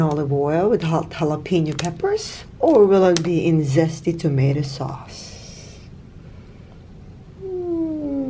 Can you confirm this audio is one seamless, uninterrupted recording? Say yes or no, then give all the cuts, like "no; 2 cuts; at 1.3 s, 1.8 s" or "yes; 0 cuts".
yes; 0 cuts